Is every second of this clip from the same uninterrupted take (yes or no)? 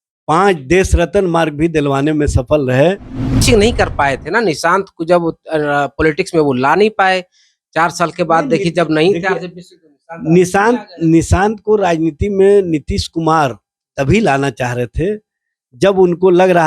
no